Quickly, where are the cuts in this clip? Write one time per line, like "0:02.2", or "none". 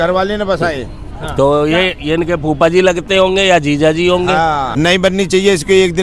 0:04.7

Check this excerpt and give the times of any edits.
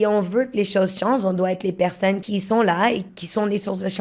0:02.2
0:03.1

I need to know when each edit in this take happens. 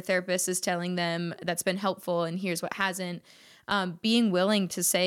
none

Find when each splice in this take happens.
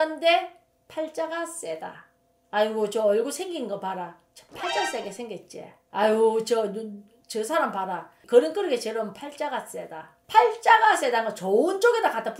0:10.2

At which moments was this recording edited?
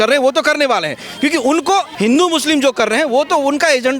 0:01.9

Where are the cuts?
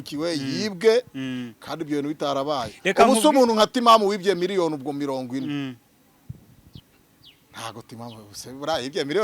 0:06.8

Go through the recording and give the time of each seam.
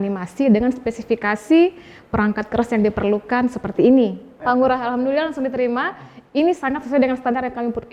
0:04.3

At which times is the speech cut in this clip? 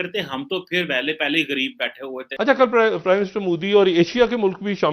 0:02.2

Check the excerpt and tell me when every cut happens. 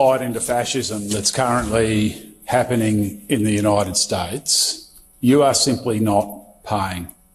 none

